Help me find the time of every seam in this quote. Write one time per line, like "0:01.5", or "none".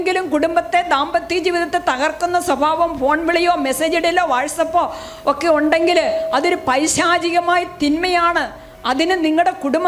none